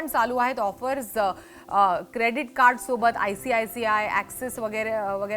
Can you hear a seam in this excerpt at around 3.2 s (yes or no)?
no